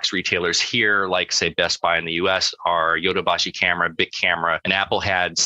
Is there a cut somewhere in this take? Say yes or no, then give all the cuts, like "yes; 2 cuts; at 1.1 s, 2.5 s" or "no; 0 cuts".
yes; 2 cuts; at 1.3 s, 4.6 s